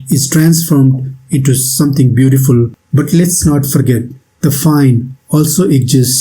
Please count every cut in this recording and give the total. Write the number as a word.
one